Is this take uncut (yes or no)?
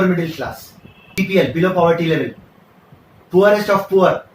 no